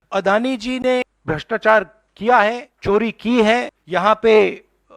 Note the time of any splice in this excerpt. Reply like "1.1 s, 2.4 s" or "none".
1.1 s, 2.7 s, 3.8 s